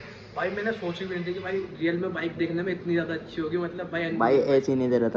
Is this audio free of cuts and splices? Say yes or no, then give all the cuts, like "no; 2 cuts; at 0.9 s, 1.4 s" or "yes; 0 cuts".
yes; 0 cuts